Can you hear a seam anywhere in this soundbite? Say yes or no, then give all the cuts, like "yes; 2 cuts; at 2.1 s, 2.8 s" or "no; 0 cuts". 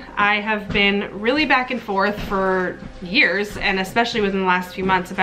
no; 0 cuts